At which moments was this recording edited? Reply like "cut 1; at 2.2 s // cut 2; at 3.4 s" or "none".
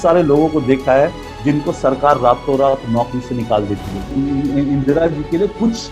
cut 1; at 4.1 s